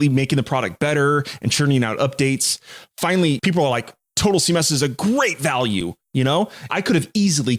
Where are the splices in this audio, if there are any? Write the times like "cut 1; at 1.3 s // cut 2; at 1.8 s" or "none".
cut 1; at 3.4 s // cut 2; at 6.7 s